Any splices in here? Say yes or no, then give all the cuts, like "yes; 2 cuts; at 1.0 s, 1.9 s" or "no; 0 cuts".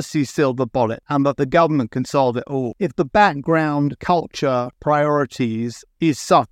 yes; 3 cuts; at 1.0 s, 2.7 s, 4.7 s